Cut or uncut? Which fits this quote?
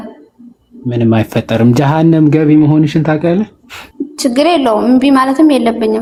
uncut